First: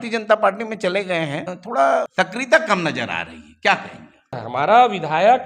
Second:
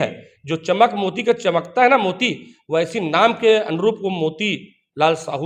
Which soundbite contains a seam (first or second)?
first